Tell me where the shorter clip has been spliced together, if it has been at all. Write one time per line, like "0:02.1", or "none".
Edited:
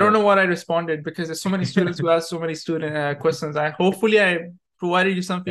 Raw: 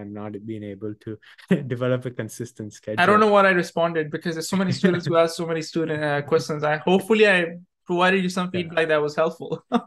none